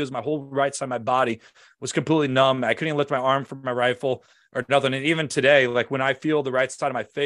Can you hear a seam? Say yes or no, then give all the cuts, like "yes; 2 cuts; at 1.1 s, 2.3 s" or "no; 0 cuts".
no; 0 cuts